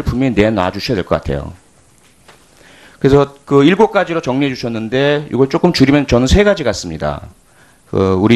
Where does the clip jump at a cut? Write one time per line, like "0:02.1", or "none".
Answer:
0:06.2